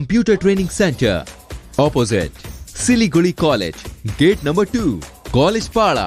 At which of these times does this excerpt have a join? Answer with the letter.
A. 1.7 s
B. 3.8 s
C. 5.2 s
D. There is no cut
D